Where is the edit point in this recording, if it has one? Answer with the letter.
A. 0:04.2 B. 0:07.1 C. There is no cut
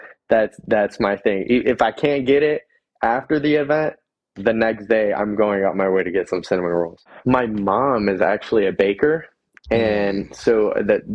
B